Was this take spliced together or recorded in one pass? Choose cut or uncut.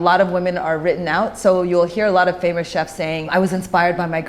cut